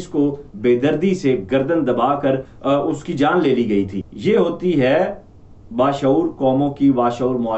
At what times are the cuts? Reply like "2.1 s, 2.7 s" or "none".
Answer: 4.0 s